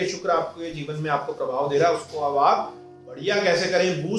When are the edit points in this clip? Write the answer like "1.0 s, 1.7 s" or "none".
none